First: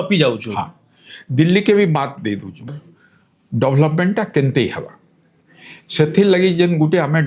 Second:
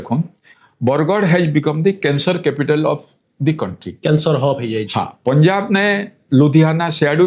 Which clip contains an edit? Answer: first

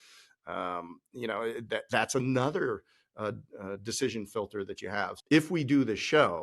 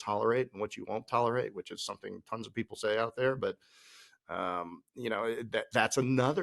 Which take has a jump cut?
first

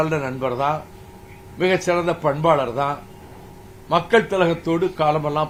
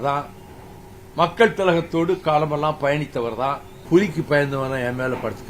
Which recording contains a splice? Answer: second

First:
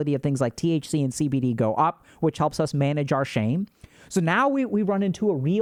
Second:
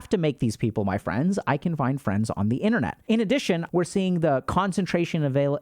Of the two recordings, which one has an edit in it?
second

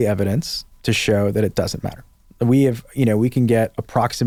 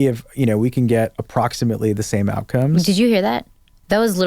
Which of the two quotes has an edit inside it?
second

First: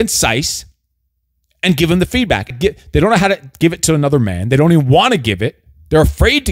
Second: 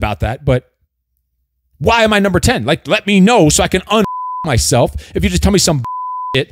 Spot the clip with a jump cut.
first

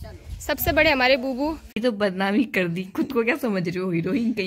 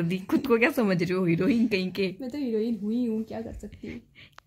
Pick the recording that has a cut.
first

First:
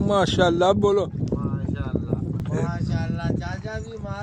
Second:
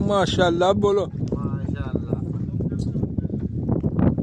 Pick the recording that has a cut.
first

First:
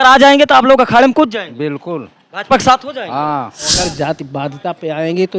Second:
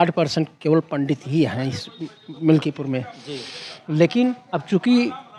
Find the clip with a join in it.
first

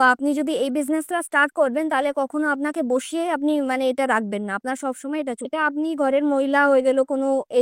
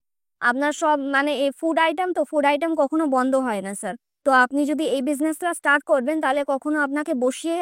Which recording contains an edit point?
first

